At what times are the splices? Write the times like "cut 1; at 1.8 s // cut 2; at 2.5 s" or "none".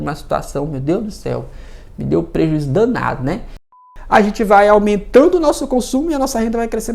cut 1; at 3.6 s